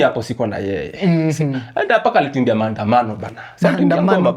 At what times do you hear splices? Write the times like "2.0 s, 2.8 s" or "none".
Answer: none